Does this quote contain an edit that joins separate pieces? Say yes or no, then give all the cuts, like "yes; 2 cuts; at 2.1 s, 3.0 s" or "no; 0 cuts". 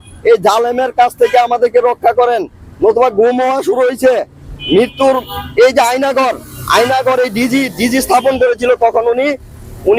no; 0 cuts